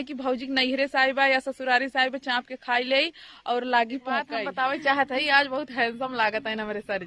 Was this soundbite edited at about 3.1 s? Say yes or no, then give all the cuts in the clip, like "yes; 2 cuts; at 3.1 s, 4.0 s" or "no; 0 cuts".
no; 1 cut; at 4.4 s